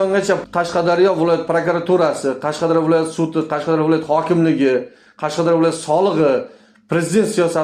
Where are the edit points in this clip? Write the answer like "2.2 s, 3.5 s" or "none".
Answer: none